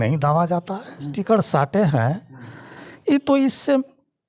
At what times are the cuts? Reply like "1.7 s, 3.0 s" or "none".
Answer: 1.1 s